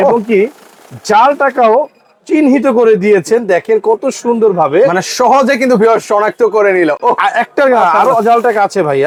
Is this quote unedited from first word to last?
yes; 0 cuts

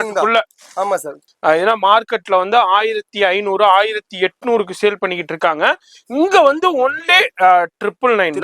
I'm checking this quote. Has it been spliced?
yes; 1 cut; at 1.2 s

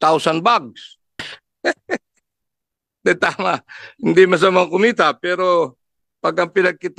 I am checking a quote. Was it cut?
yes; 1 cut; at 1.4 s

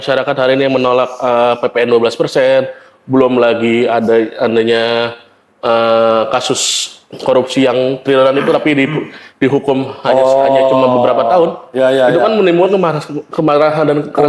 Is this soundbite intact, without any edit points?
yes; 0 cuts

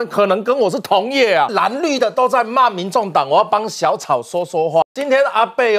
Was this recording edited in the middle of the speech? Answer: yes; 2 cuts; at 1.5 s, 4.8 s

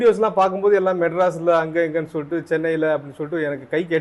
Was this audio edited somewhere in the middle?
no; 0 cuts

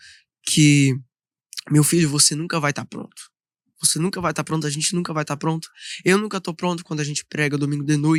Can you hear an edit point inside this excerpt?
no; 0 cuts

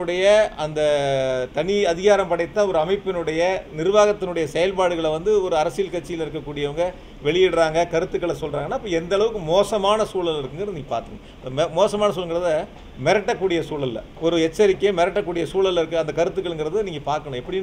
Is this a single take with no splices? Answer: no; 1 cut; at 14.1 s

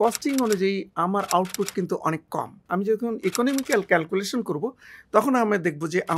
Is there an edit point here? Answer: yes; 1 cut; at 2.6 s

